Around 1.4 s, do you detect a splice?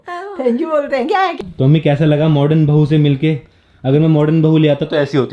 yes; 1 cut; at 1.4 s

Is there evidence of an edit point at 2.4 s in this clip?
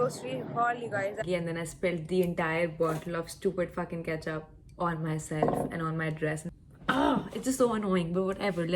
no; 2 cuts; at 1.2 s, 6.4 s

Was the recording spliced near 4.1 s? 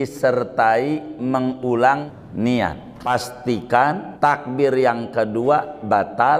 yes; 3 cuts; at 2.1 s, 3.1 s, 4.1 s

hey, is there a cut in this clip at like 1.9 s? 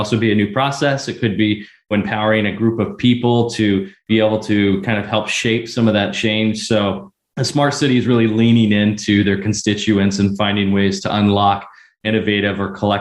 yes; 1 cut; at 1.9 s

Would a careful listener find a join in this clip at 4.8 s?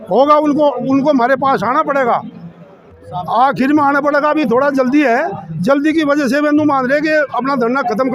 no; 0 cuts

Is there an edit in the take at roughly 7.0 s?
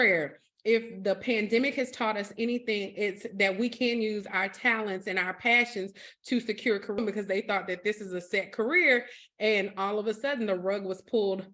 yes; 1 cut; at 7.0 s

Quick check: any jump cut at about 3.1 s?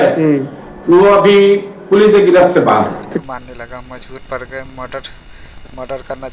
yes; 1 cut; at 3.1 s

